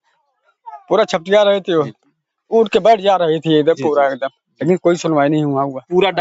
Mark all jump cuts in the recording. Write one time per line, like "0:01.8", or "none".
none